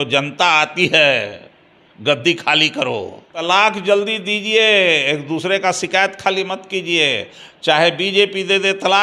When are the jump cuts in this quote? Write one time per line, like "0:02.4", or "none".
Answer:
0:03.4